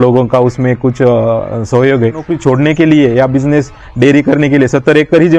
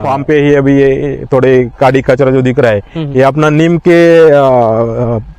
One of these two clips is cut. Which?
first; 1 cut; at 2.3 s

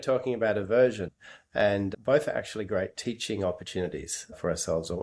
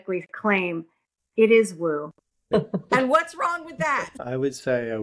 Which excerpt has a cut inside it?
second; 2 cuts; at 2.4 s, 4.1 s

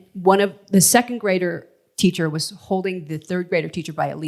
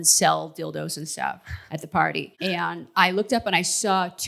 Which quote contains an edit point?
second; 1 cut; at 2.3 s

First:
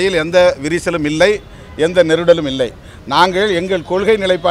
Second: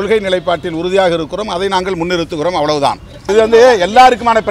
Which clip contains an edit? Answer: second; 1 cut; at 3.2 s

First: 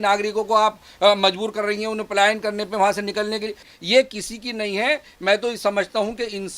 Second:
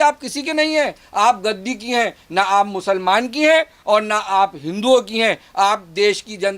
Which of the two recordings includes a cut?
first; 1 cut; at 3.6 s

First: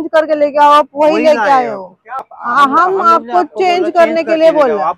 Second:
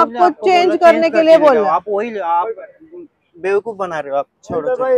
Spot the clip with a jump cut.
first; 1 cut; at 2.2 s

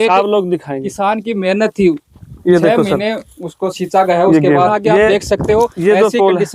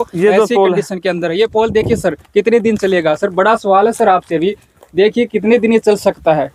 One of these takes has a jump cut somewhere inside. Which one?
first; 1 cut; at 4.7 s

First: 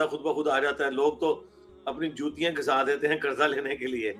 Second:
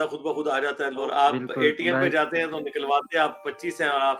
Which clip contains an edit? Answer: second; 1 cut; at 1.0 s

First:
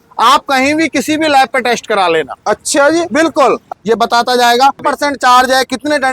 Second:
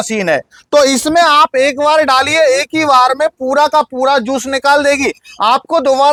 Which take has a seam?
first; 2 cuts; at 3.6 s, 4.8 s

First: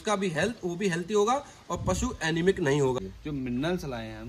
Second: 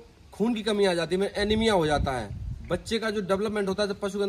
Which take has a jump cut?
first; 1 cut; at 3.1 s

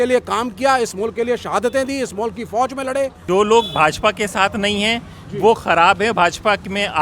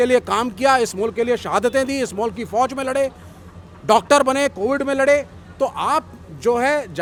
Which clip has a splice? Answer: first; 1 cut; at 3.2 s

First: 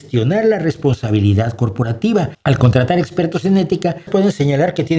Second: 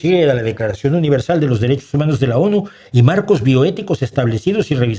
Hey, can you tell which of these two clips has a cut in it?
first; 2 cuts; at 2.3 s, 4.1 s

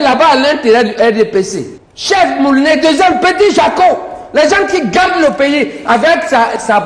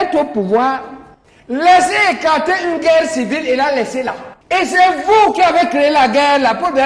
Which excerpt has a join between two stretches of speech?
second; 1 cut; at 4.3 s

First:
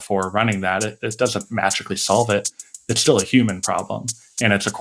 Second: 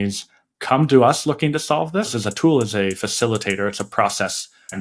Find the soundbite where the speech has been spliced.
second; 1 cut; at 2.1 s

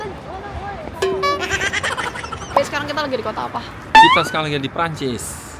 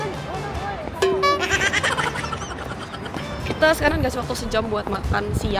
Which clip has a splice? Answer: first; 2 cuts; at 2.4 s, 3.7 s

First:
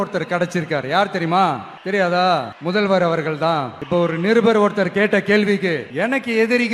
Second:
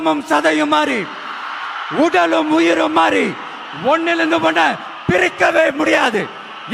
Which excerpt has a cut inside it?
first; 4 cuts; at 1.7 s, 2.5 s, 3.8 s, 5.9 s

